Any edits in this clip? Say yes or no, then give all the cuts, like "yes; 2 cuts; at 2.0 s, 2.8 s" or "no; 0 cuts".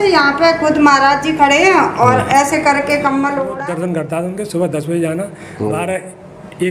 yes; 1 cut; at 3.5 s